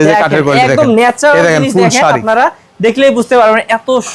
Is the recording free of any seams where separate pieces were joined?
yes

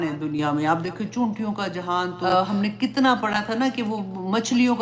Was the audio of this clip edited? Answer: yes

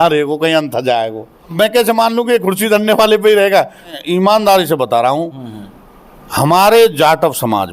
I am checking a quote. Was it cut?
yes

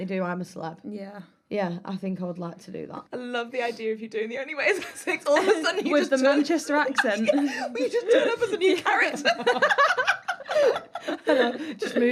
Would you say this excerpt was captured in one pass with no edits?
yes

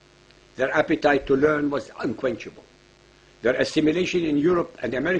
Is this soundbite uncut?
yes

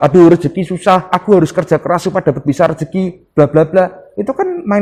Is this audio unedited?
yes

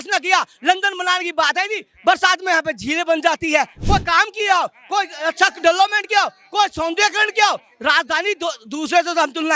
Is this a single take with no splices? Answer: yes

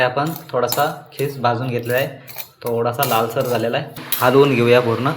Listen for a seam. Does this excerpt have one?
yes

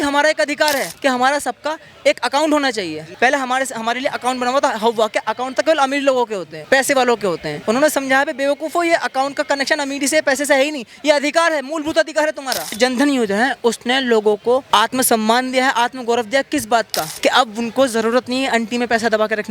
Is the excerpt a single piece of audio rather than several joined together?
no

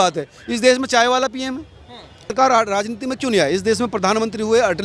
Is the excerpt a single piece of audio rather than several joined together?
no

